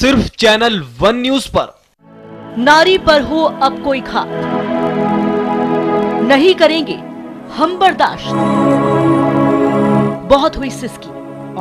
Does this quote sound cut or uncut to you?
cut